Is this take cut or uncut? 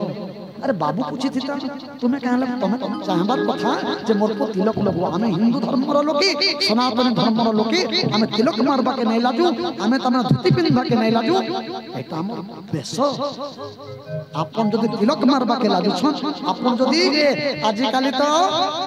cut